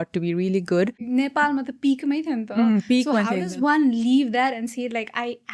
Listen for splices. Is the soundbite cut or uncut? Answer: cut